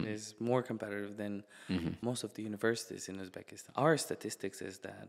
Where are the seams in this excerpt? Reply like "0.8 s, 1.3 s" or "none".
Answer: 2.0 s, 3.6 s